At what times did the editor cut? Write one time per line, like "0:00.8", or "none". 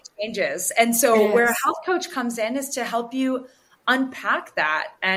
none